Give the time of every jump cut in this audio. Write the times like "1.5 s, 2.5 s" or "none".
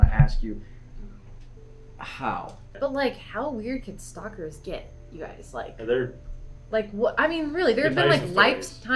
2.6 s